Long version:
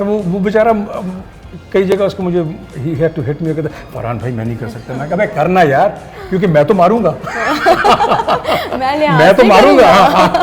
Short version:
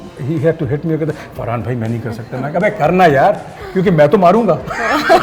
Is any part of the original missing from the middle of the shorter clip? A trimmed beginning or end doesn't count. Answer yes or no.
no